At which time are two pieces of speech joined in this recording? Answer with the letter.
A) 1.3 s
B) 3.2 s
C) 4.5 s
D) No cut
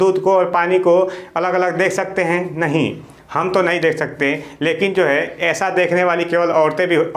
D